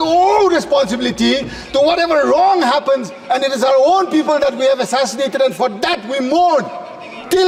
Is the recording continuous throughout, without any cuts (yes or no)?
yes